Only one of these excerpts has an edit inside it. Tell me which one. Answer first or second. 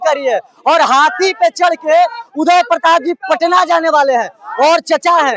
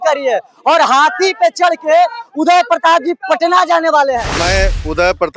second